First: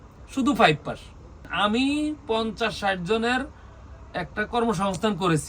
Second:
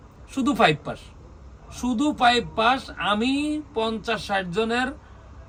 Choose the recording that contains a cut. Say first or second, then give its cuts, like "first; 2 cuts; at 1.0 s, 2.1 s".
first; 1 cut; at 1.4 s